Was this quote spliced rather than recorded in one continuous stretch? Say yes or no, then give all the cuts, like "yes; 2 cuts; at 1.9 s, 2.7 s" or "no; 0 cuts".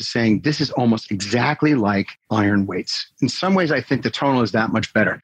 yes; 2 cuts; at 2.2 s, 3.3 s